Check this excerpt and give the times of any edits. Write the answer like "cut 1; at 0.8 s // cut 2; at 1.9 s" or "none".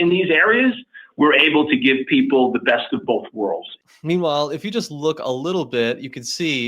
cut 1; at 3.8 s